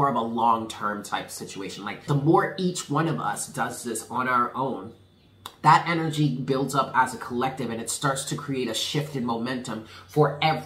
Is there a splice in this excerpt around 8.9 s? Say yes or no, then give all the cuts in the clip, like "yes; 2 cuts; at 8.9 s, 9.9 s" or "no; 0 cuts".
no; 1 cut; at 2.0 s